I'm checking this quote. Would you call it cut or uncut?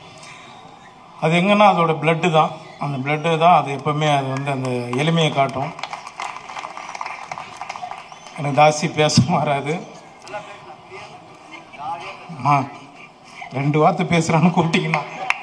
uncut